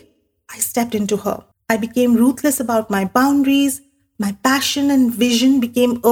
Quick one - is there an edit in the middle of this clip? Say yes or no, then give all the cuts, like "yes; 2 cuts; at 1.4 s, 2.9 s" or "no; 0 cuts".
yes; 1 cut; at 1.5 s